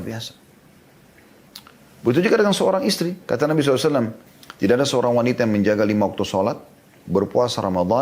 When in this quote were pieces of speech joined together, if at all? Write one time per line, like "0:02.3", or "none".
0:04.2